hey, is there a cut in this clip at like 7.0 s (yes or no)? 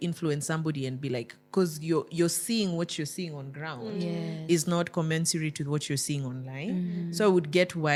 no